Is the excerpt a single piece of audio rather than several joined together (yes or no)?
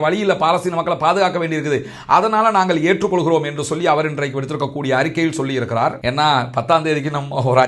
no